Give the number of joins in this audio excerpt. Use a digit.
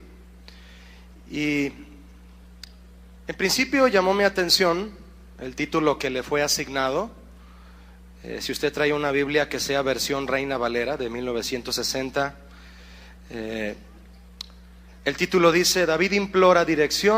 1